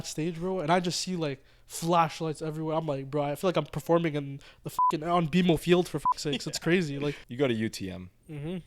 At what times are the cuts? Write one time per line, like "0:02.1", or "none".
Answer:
0:07.2